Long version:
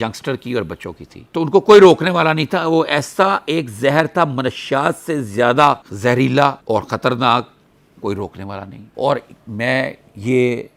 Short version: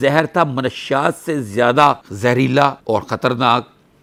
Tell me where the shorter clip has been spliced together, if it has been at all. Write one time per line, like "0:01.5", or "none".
none